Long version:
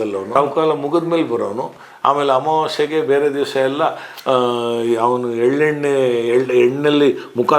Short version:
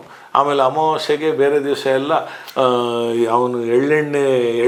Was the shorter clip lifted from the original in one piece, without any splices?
yes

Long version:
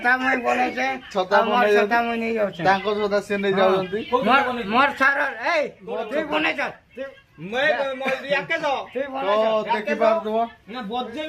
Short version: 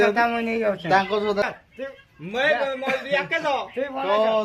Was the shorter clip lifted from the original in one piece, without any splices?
no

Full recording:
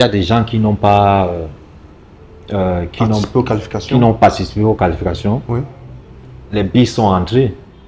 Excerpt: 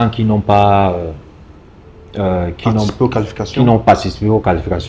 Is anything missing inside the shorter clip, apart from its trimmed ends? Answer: no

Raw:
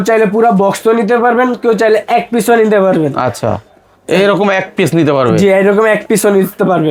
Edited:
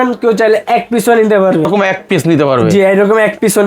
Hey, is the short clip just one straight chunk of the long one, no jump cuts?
no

